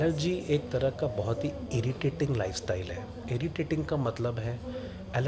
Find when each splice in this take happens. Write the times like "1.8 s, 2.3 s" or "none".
none